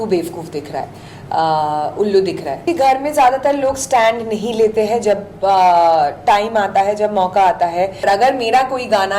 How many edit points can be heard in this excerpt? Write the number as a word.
two